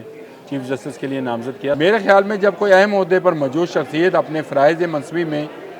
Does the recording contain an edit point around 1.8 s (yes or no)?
yes